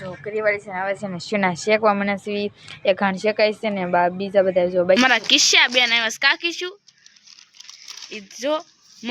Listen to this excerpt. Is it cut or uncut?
cut